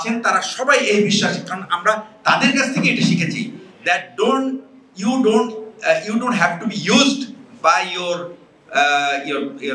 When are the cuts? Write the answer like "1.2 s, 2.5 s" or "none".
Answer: none